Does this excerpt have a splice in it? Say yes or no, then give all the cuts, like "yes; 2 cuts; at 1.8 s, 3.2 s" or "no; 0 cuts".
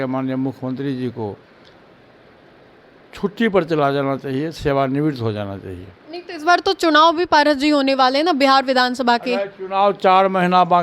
no; 0 cuts